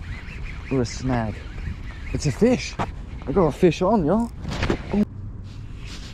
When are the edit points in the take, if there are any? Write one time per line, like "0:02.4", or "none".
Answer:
0:05.0